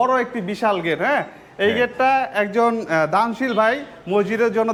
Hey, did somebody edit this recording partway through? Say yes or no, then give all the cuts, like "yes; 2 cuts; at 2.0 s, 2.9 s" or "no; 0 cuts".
no; 0 cuts